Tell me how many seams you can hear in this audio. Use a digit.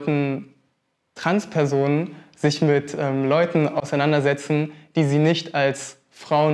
0